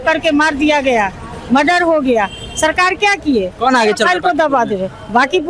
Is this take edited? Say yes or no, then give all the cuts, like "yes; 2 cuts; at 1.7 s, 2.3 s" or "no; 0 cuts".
no; 0 cuts